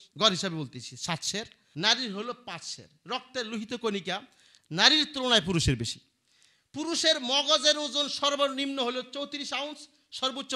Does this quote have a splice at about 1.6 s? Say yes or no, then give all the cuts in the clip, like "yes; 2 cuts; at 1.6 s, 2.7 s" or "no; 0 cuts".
yes; 1 cut; at 1.6 s